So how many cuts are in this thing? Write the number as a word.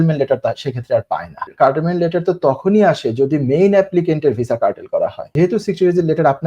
two